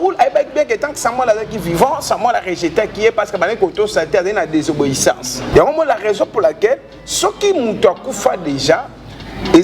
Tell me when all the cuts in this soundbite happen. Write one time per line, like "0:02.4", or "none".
0:05.5